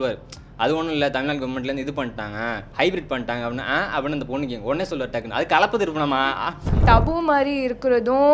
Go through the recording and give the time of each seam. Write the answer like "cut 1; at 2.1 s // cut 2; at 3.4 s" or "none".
cut 1; at 6.8 s